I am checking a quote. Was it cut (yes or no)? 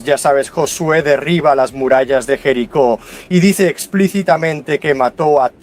no